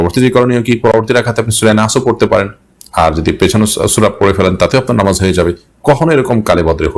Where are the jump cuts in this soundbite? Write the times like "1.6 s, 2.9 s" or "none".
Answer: none